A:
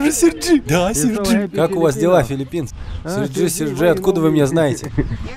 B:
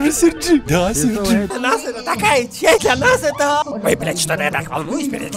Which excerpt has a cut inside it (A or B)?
B